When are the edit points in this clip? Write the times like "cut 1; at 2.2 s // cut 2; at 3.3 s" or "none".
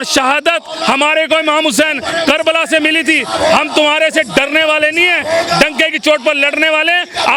none

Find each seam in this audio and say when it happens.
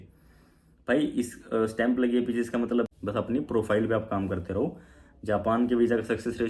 cut 1; at 2.9 s

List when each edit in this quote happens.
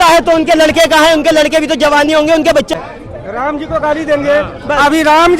cut 1; at 2.7 s

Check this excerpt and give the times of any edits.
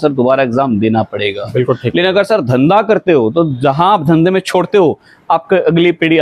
none

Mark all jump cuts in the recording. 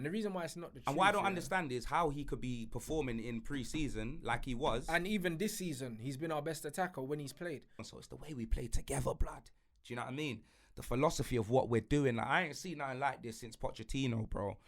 cut 1; at 7.9 s

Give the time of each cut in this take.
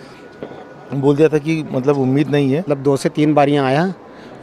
cut 1; at 2.7 s

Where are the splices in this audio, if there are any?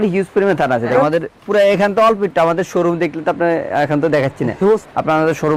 cut 1; at 0.9 s // cut 2; at 4.8 s

